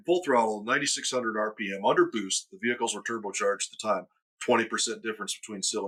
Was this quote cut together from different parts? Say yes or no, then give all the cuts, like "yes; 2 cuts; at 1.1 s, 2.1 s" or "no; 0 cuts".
no; 0 cuts